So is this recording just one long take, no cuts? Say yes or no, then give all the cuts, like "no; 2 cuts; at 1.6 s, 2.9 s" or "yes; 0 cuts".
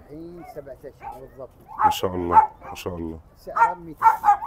yes; 0 cuts